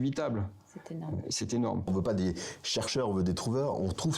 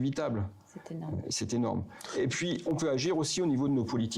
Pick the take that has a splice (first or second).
first